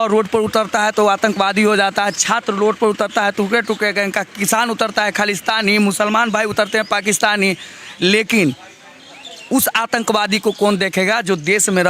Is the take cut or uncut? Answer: uncut